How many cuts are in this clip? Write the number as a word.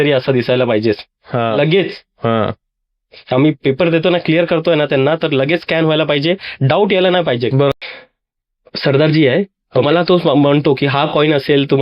one